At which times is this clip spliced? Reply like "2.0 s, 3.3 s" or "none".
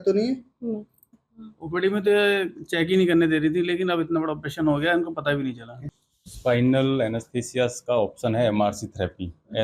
1.1 s, 5.9 s